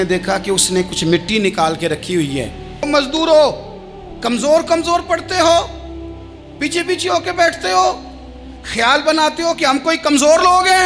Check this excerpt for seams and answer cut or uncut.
cut